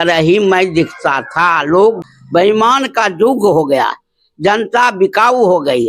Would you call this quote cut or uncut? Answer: cut